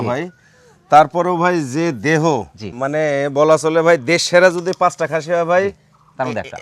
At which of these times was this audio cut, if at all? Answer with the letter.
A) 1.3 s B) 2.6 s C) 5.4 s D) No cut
B